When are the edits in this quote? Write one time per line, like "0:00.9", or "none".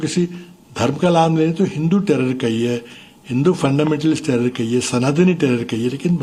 none